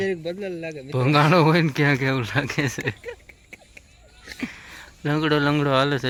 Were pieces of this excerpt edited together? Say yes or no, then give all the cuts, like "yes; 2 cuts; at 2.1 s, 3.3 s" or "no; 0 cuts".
no; 0 cuts